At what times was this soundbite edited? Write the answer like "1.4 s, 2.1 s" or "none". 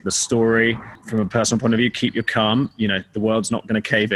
0.9 s, 2.7 s